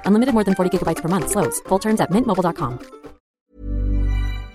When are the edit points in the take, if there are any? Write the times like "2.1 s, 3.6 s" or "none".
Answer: 3.5 s